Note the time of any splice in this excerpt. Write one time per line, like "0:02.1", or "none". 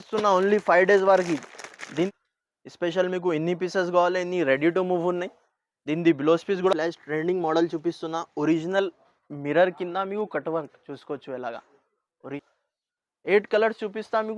0:02.1
0:06.7
0:12.4